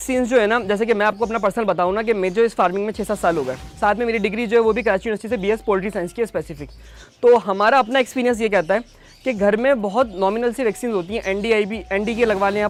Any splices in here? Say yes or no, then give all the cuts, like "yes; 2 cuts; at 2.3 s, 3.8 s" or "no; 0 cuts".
no; 0 cuts